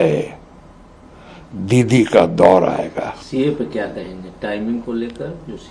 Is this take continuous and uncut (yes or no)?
yes